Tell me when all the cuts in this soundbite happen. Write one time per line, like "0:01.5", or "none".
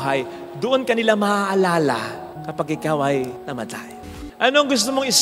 0:04.2